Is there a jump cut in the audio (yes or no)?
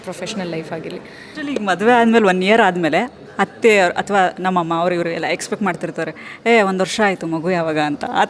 yes